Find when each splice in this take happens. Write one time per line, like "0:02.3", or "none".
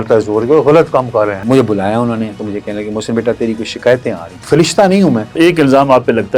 0:01.4
0:04.3
0:05.3